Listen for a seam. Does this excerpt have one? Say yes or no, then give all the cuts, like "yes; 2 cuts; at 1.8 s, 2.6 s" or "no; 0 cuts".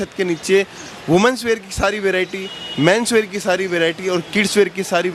no; 0 cuts